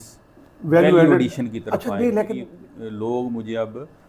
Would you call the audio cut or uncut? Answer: cut